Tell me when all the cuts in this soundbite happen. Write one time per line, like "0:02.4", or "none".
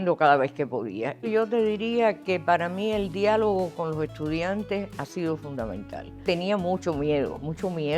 0:01.2
0:06.2